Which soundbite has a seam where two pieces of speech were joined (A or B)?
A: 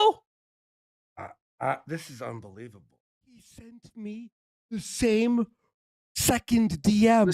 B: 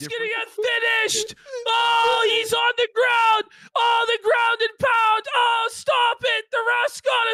A